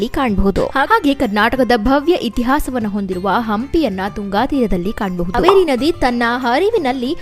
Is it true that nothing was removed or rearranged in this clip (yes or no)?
no